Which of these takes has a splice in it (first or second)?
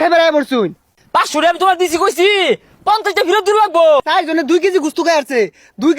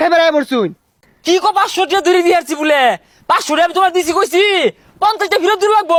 first